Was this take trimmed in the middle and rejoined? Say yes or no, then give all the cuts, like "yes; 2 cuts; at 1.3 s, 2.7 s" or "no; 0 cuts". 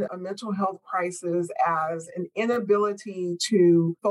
yes; 1 cut; at 2.3 s